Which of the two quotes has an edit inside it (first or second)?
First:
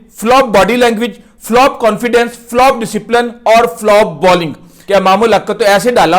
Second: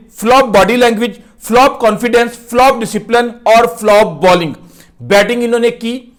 first